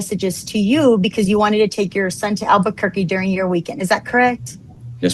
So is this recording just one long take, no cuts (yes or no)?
yes